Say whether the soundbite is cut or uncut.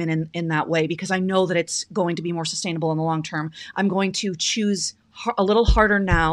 uncut